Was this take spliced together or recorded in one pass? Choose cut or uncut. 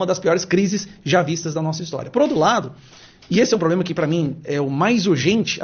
uncut